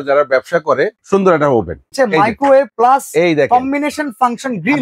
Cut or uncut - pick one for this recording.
cut